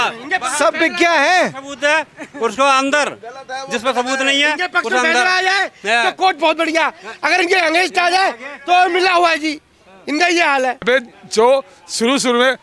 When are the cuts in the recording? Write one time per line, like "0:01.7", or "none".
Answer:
0:10.8